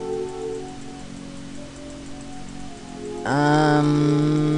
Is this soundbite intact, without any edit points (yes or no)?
no